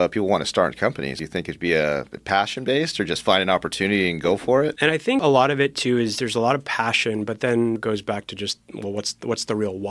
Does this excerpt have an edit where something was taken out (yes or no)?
yes